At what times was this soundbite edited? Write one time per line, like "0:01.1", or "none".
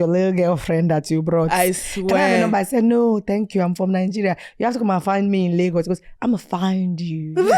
none